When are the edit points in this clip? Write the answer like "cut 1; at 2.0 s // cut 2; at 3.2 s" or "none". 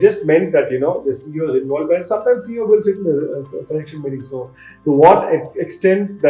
none